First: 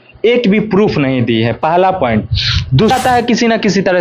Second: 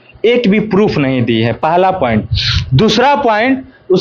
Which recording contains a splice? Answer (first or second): first